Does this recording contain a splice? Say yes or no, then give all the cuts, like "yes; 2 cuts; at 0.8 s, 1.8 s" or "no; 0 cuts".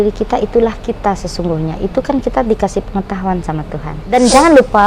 yes; 1 cut; at 4.0 s